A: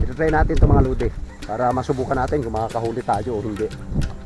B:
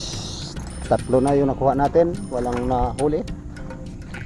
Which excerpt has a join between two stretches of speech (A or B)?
A